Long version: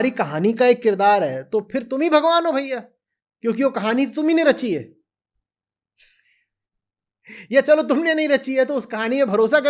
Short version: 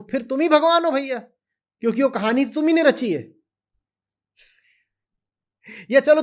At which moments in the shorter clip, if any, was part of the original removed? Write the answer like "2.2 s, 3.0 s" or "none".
none